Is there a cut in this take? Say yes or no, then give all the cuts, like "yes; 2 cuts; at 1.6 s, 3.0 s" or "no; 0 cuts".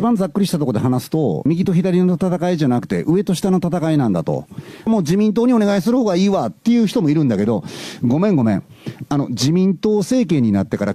yes; 1 cut; at 4.9 s